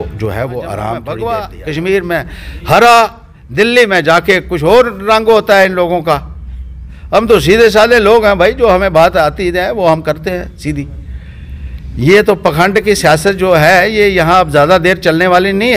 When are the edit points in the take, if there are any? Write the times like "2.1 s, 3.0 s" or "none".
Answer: 1.0 s